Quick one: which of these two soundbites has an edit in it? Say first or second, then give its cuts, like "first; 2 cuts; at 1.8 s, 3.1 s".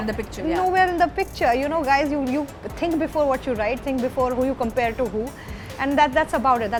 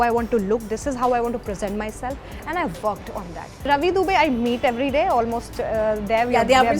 second; 1 cut; at 3.7 s